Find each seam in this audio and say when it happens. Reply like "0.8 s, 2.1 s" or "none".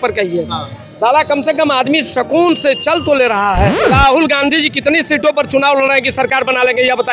3.8 s